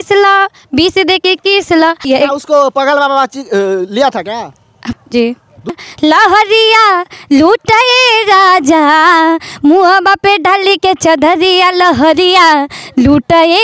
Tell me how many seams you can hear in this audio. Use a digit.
3